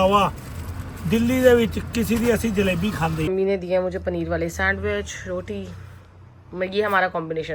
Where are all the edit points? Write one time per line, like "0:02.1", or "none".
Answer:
0:03.3